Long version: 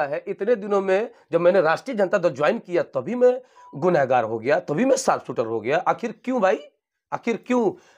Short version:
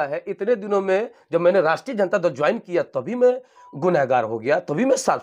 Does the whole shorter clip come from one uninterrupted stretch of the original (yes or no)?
yes